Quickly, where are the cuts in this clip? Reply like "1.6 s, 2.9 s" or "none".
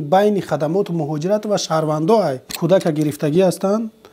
2.5 s